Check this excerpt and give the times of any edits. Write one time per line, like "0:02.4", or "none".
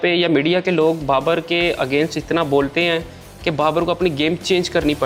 none